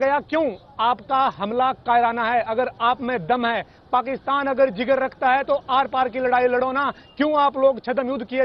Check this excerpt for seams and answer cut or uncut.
uncut